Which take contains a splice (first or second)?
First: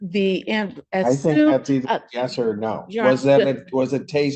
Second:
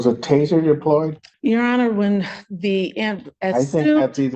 second